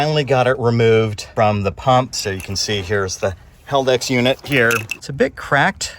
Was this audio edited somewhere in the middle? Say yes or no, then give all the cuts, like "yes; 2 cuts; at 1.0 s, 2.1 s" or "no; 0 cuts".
yes; 3 cuts; at 1.2 s, 2.2 s, 5.0 s